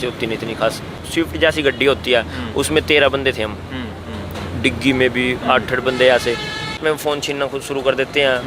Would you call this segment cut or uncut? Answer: cut